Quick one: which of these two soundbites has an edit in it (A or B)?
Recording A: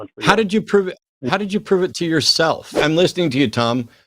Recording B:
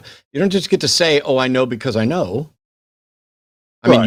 A